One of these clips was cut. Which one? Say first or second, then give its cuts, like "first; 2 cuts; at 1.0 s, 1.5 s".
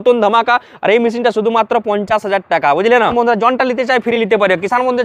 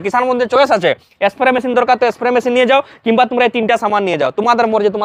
first; 1 cut; at 3.1 s